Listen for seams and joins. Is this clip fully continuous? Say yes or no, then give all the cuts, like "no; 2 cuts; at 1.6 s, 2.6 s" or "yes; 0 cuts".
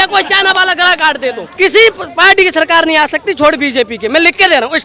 no; 1 cut; at 1.5 s